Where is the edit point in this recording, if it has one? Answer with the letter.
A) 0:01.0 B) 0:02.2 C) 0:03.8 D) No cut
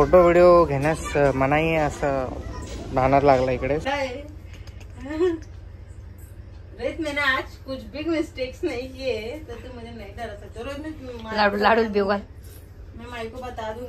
C